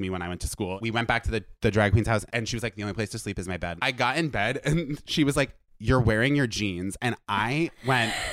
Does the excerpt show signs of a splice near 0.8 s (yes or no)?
yes